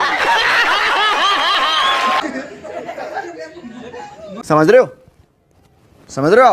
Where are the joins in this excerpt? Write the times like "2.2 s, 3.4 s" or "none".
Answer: 2.2 s